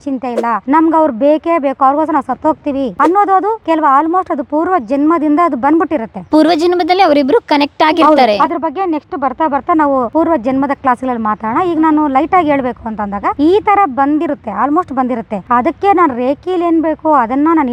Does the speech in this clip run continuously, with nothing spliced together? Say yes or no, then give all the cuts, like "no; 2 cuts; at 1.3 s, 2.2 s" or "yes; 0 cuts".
yes; 0 cuts